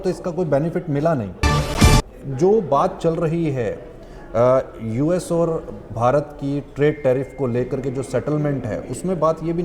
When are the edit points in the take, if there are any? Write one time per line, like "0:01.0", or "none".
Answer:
0:01.8